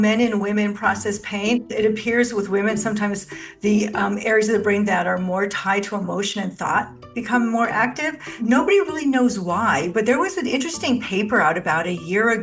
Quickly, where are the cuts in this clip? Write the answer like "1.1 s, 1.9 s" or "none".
1.7 s, 8.2 s